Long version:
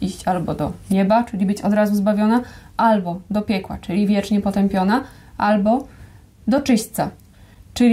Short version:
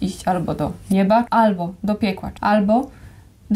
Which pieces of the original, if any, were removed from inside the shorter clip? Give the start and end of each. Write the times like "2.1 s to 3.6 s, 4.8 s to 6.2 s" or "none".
1.3 s to 2.7 s, 3.7 s to 5.2 s